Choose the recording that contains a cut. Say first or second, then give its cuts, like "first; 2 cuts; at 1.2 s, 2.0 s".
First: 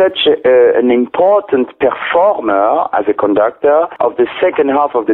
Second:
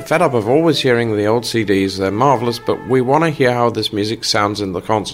first; 1 cut; at 3.9 s